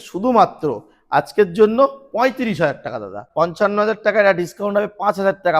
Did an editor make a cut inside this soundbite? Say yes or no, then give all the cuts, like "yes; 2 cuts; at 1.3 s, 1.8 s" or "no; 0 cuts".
yes; 1 cut; at 3.2 s